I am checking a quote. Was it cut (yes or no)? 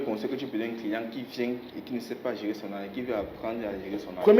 no